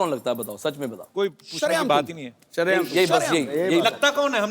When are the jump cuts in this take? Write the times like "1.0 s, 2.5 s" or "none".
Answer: none